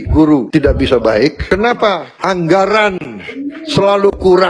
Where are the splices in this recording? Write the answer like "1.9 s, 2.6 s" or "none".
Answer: 1.4 s